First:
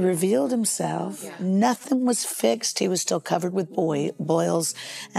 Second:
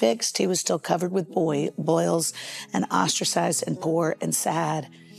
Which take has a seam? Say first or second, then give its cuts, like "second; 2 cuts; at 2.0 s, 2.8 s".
first; 1 cut; at 1.4 s